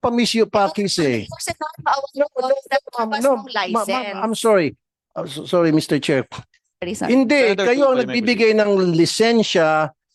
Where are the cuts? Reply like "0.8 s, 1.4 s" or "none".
none